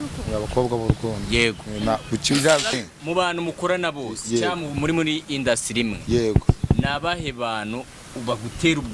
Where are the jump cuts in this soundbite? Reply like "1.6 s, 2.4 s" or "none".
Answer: 2.8 s